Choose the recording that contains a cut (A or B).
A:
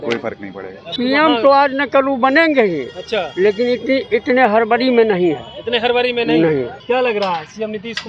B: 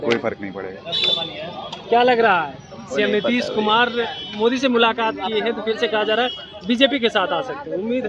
A